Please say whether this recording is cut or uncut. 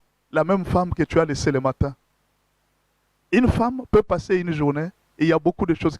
uncut